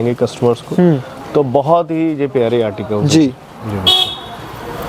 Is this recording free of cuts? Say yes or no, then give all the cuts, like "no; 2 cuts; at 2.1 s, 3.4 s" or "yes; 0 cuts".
yes; 0 cuts